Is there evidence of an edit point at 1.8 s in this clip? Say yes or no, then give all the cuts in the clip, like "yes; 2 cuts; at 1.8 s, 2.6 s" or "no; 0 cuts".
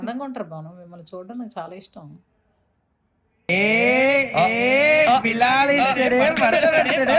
no; 0 cuts